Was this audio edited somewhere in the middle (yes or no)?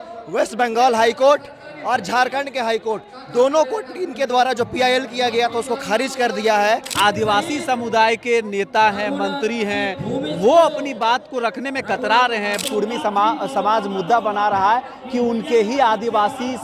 yes